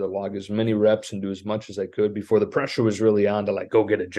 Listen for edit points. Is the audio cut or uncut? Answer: uncut